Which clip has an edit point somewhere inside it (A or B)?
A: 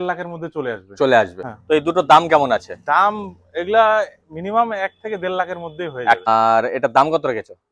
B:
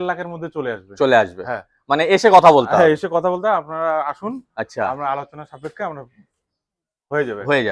A